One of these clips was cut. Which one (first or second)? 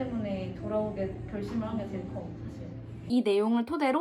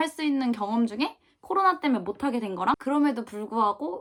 first